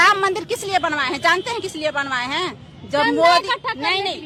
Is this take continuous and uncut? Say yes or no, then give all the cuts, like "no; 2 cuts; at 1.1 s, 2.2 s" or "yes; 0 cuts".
yes; 0 cuts